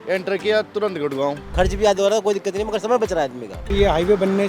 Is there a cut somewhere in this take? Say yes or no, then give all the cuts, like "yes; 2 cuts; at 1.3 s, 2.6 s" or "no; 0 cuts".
yes; 2 cuts; at 1.5 s, 3.7 s